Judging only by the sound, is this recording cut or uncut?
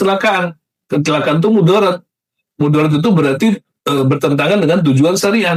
uncut